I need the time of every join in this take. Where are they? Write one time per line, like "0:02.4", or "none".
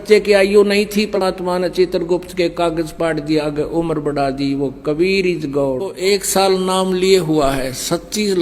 0:01.2
0:05.9